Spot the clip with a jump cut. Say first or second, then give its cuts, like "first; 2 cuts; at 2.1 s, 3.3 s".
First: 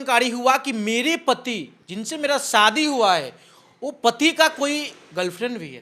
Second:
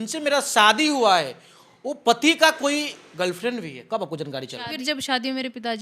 second; 1 cut; at 4.8 s